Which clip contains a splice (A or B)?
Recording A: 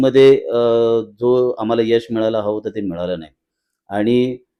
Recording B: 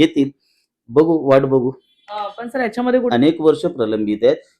B